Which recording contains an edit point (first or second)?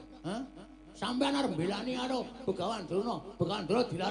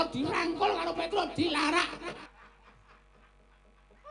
second